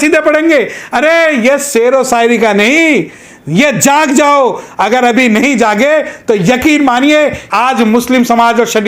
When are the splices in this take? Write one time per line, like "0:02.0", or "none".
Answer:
0:07.4